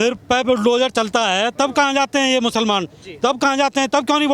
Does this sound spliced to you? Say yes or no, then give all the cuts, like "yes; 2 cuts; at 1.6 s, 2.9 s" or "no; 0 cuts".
no; 0 cuts